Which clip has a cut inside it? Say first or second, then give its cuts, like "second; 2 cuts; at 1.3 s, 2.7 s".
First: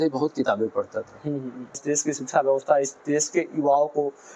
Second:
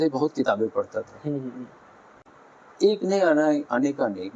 first; 1 cut; at 1.8 s